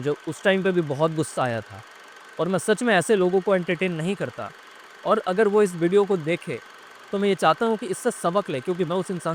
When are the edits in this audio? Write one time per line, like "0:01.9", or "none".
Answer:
none

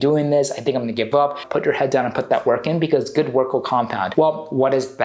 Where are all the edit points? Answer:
0:01.4
0:04.0

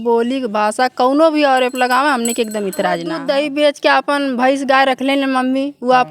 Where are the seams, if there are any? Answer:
0:03.1

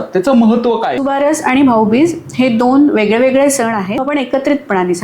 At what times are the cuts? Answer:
0:00.9
0:04.0

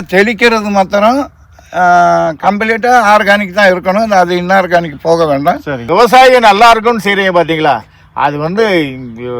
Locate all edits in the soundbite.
0:05.8

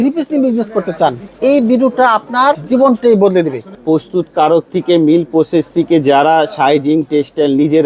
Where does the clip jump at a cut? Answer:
0:01.3
0:02.6
0:03.8

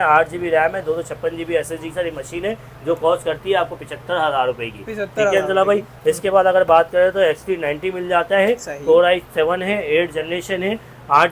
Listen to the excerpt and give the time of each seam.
none

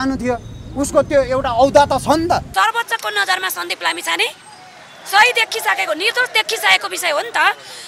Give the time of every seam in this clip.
0:02.5

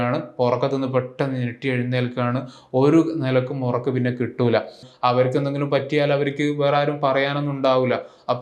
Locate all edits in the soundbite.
0:04.8

